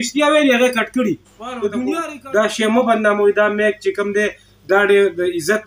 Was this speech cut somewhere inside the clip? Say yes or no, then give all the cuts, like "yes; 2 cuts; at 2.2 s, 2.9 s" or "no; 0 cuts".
yes; 1 cut; at 2.1 s